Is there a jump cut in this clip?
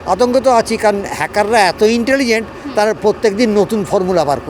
no; 0 cuts

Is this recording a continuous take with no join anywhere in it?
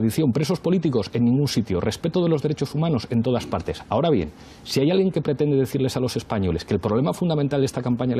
no; 1 cut; at 6.9 s

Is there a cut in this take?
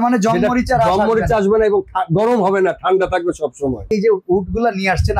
yes; 1 cut; at 3.9 s

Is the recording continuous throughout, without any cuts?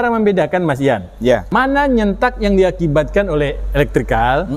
no; 1 cut; at 1.5 s

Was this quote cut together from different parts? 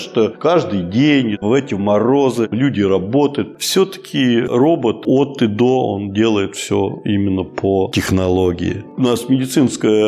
yes; 2 cuts; at 3.5 s, 8.9 s

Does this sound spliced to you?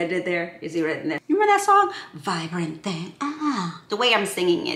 yes; 1 cut; at 1.2 s

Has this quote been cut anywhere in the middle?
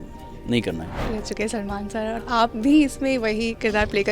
yes; 1 cut; at 1.0 s

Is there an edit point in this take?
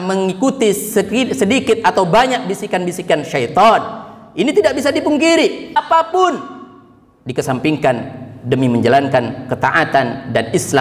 yes; 1 cut; at 5.7 s

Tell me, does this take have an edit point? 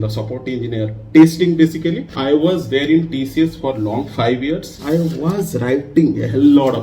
yes; 2 cuts; at 2.2 s, 4.7 s

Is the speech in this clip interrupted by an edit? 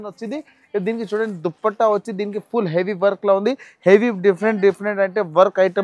no; 0 cuts

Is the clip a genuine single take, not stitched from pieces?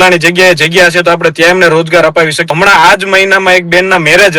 no; 1 cut; at 2.4 s

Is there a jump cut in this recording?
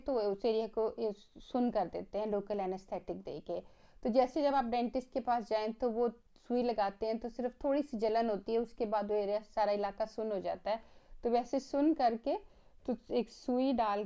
no; 0 cuts

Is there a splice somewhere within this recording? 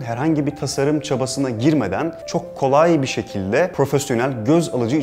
yes; 2 cuts; at 2.2 s, 3.7 s

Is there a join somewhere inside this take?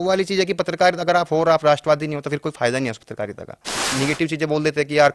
yes; 1 cut; at 3.9 s

